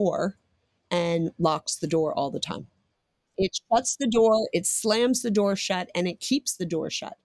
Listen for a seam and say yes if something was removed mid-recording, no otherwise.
yes